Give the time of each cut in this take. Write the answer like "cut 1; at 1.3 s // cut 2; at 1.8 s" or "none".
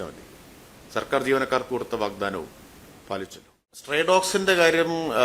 cut 1; at 3.9 s

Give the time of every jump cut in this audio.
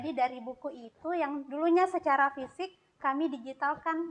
none

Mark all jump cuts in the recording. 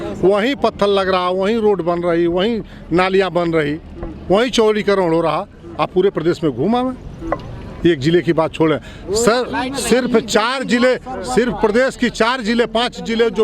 none

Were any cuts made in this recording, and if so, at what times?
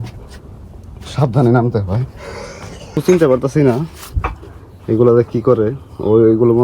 cut 1; at 2.9 s

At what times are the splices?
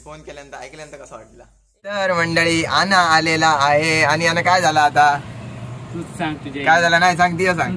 cut 1; at 2.1 s

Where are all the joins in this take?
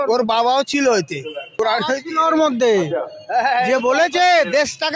cut 1; at 1.4 s

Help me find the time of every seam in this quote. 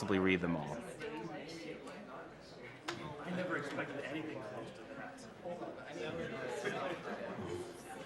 cut 1; at 3.9 s

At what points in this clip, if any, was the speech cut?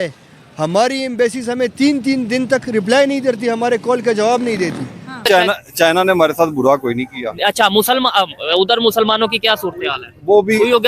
cut 1; at 5.1 s

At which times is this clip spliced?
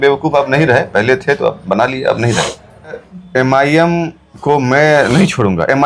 cut 1; at 3.1 s

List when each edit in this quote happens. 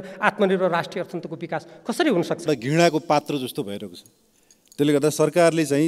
cut 1; at 2.4 s

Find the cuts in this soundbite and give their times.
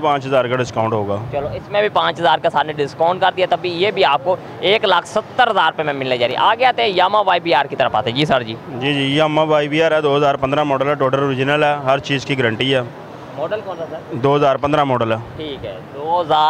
none

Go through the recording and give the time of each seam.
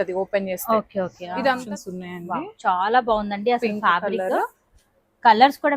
cut 1; at 1.6 s

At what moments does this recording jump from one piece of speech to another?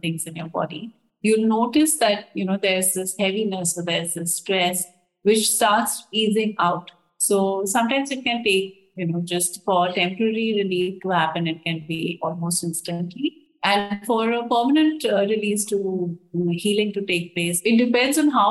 cut 1; at 17.6 s

